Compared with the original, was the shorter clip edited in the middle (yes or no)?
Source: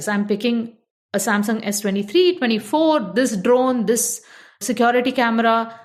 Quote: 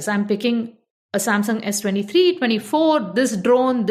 no